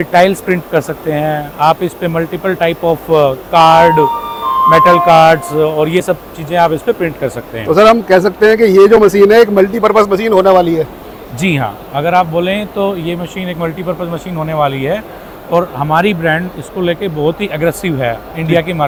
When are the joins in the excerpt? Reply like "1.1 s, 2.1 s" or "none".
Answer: none